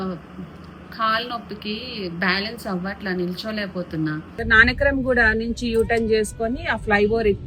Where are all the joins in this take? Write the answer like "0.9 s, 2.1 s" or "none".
4.4 s

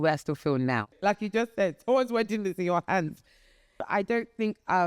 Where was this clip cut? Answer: 0.9 s, 3.8 s

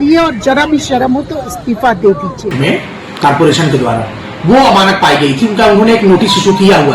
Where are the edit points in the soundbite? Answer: 2.5 s

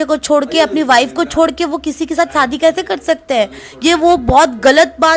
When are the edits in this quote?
none

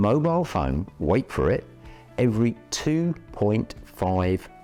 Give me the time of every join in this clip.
none

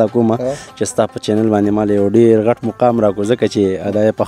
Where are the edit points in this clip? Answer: none

